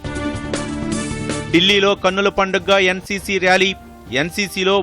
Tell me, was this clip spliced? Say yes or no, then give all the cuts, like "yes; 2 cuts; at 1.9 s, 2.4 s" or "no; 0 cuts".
no; 0 cuts